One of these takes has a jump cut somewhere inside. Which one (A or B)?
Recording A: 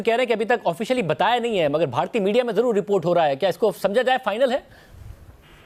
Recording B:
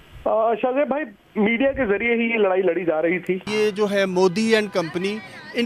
B